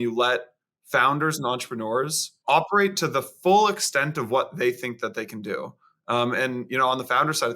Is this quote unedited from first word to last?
no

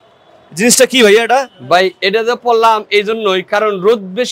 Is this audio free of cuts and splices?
yes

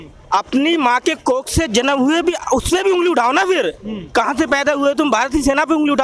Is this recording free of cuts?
yes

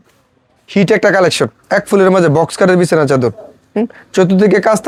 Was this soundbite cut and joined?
no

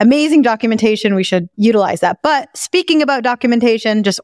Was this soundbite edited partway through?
yes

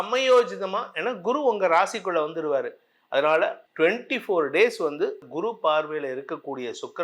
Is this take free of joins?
no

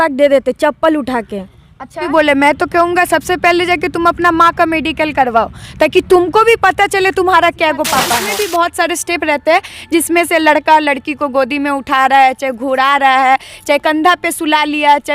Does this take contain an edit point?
yes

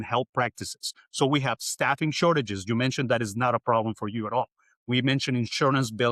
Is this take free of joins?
yes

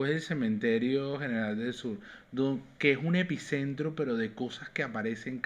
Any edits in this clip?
no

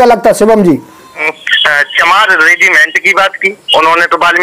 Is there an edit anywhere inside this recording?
yes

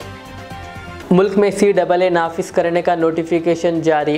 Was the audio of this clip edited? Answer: no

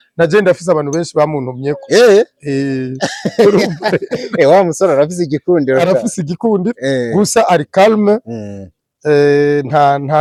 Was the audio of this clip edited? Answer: no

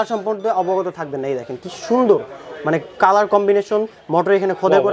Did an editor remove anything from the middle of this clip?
no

